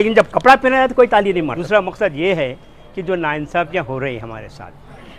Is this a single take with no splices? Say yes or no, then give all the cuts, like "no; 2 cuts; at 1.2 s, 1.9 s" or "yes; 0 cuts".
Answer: no; 1 cut; at 1.5 s